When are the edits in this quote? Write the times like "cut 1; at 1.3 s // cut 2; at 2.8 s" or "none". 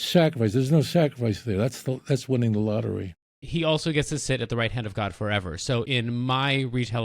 cut 1; at 3.4 s // cut 2; at 5.8 s